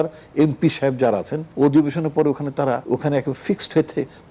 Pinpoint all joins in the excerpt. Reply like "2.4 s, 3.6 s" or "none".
1.4 s, 2.8 s